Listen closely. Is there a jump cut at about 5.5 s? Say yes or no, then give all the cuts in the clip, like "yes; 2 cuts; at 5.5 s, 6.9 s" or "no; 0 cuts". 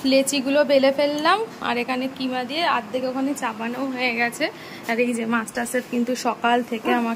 no; 0 cuts